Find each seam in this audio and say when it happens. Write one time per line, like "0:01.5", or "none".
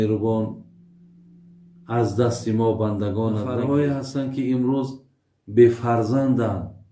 0:03.5